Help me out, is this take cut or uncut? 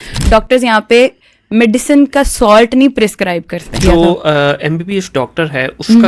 cut